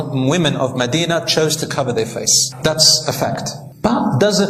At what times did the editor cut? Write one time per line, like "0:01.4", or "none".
none